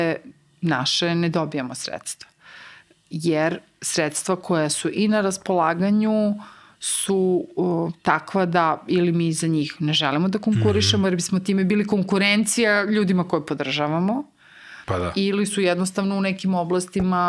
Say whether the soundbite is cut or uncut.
uncut